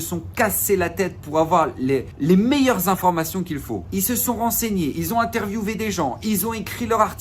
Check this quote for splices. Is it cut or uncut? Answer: cut